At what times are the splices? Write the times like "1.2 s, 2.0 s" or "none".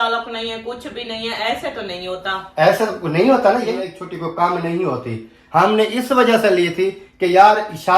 3.7 s